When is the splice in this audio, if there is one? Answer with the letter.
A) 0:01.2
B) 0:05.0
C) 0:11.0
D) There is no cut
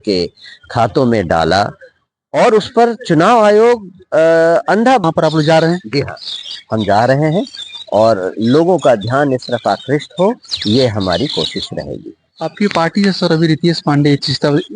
B